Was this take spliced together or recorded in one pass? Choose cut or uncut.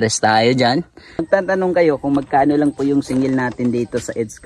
cut